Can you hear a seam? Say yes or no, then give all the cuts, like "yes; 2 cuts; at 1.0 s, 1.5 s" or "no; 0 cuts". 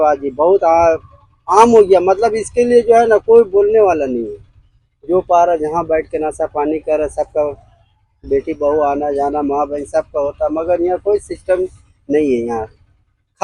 no; 0 cuts